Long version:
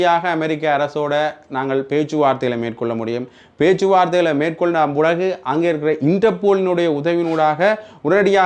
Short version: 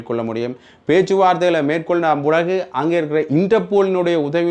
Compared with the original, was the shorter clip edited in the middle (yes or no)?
no